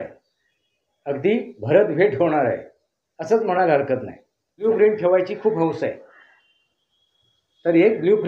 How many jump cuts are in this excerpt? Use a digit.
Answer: 1